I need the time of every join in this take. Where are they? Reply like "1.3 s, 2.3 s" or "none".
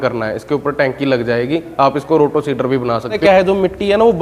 3.2 s